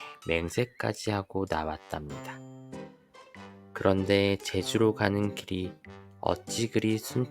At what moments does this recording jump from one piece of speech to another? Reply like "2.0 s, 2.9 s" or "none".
2.1 s, 3.8 s